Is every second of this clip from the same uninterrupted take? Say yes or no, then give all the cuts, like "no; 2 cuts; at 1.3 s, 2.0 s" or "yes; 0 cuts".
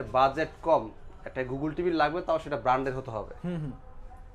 yes; 0 cuts